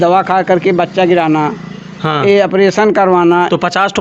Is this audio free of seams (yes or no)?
yes